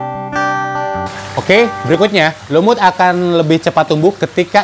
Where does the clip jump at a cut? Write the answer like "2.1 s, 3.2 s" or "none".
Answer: 1.4 s